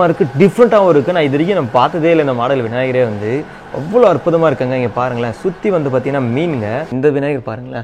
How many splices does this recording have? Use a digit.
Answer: 1